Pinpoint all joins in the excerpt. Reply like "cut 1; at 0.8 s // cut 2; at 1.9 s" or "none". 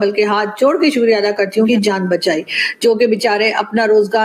cut 1; at 1.7 s

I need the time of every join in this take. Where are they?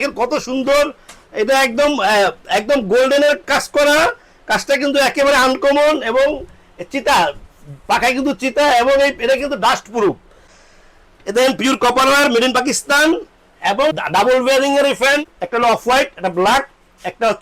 cut 1; at 10.5 s // cut 2; at 15.2 s

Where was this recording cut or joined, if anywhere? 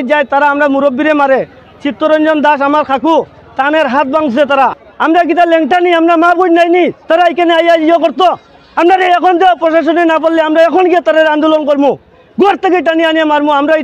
cut 1; at 4.9 s

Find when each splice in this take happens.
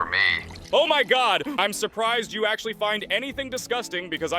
cut 1; at 1.6 s

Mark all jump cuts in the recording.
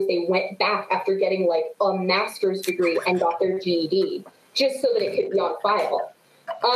none

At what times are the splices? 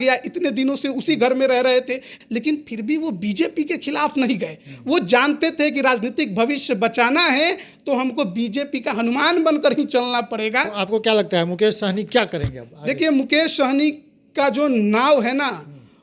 cut 1; at 2.1 s

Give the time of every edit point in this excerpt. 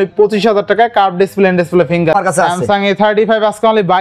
cut 1; at 2.1 s

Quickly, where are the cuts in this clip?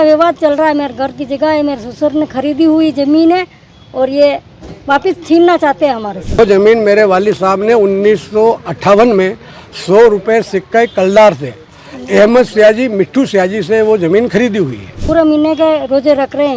cut 1; at 6.4 s // cut 2; at 14.9 s

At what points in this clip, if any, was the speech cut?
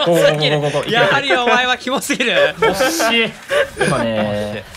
none

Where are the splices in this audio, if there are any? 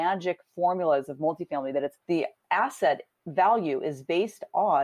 none

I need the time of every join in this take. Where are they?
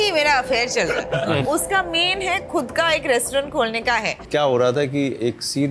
cut 1; at 1.4 s // cut 2; at 4.2 s

